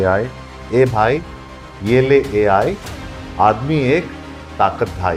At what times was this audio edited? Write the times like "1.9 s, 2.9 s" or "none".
none